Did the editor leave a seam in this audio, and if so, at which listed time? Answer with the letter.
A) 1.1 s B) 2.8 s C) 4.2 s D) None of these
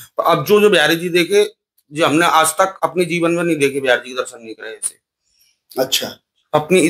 D